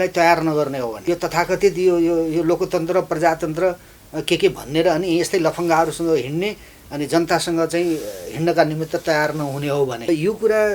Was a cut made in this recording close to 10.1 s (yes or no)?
yes